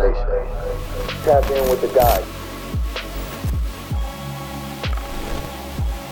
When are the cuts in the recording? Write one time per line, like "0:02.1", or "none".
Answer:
0:02.2